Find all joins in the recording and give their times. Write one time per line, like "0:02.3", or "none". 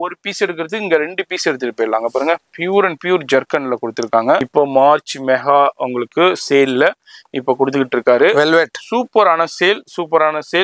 0:04.5